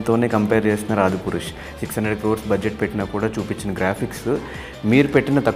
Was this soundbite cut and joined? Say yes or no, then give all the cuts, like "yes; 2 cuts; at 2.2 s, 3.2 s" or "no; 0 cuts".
no; 0 cuts